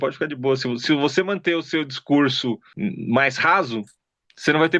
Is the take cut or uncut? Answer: cut